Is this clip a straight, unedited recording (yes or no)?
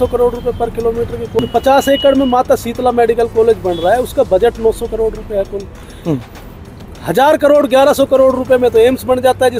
no